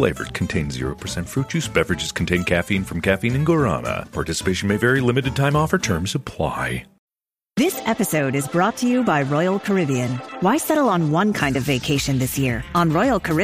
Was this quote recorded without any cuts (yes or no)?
no